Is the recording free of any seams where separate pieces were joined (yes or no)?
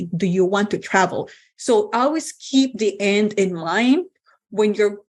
yes